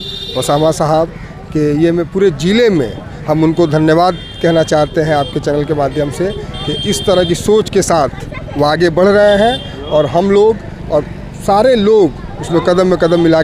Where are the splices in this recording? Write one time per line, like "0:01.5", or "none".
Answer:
none

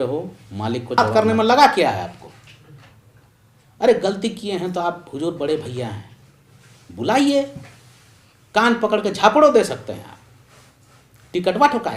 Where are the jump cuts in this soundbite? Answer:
0:01.0

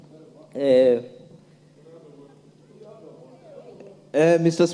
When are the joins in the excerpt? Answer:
none

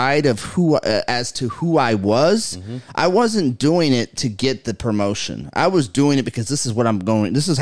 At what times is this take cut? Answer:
none

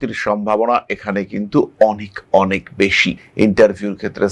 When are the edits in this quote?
0:03.2

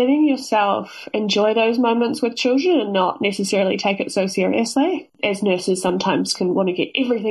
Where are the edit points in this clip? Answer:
0:05.1

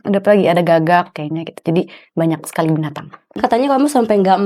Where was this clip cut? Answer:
0:03.2

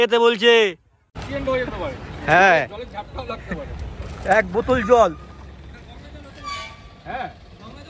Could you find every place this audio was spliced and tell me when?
0:01.2

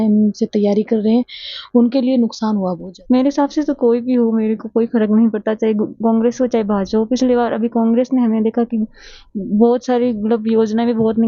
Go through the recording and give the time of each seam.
0:02.9

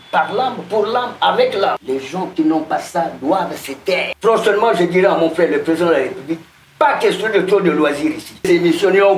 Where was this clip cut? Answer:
0:01.8
0:04.1
0:08.4

